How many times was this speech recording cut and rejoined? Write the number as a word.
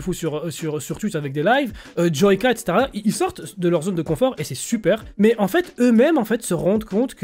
one